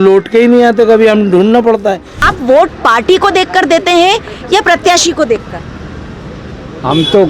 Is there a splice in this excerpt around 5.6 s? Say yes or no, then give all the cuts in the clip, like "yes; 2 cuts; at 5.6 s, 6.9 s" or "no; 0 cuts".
no; 1 cut; at 2.2 s